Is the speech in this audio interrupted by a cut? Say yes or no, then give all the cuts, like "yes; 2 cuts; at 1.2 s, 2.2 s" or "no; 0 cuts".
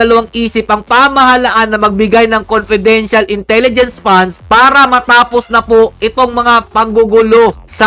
no; 0 cuts